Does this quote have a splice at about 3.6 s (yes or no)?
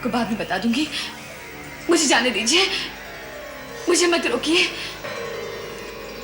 no